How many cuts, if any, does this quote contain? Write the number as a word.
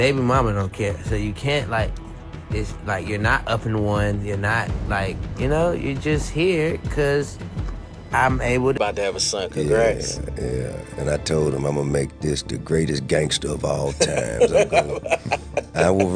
one